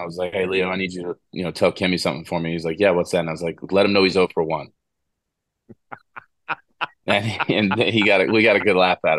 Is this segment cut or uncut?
uncut